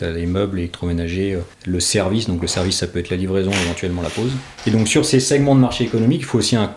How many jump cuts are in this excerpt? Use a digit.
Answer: 2